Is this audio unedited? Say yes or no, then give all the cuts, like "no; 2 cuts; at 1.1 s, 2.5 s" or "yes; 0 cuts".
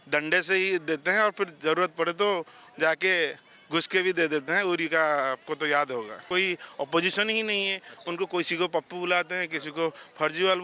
no; 1 cut; at 6.3 s